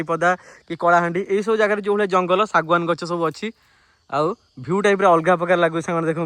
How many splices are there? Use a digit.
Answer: 0